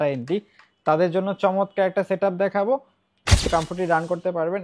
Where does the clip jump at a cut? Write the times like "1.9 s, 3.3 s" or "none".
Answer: 3.5 s